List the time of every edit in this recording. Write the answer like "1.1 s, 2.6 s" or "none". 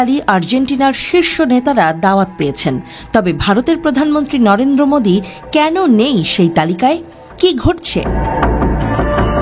none